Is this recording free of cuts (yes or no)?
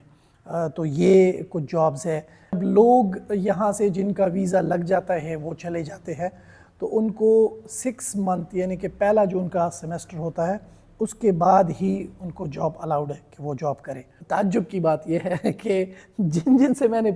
no